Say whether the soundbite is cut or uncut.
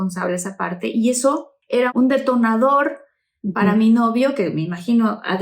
cut